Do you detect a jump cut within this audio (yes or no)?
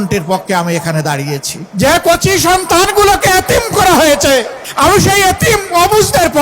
yes